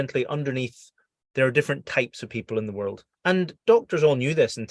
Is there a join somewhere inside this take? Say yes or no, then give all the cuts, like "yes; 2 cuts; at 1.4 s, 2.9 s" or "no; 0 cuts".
yes; 1 cut; at 3.5 s